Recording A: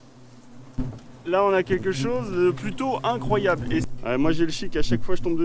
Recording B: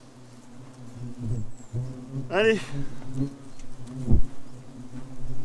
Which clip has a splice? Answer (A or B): A